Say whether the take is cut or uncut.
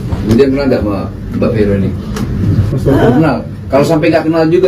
cut